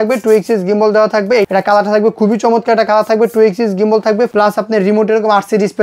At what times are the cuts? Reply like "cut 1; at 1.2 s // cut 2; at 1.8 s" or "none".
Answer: cut 1; at 1.5 s // cut 2; at 4.3 s